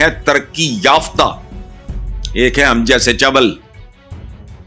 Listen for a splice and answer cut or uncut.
uncut